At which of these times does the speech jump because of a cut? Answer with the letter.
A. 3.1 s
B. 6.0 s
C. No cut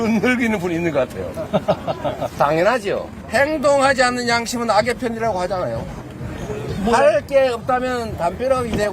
A